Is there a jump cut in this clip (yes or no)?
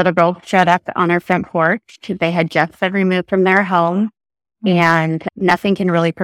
no